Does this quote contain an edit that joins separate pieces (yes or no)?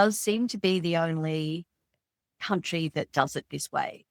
no